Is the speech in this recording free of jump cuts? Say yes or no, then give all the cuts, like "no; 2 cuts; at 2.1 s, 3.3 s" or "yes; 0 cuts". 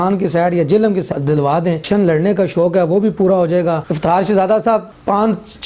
no; 2 cuts; at 1.6 s, 3.9 s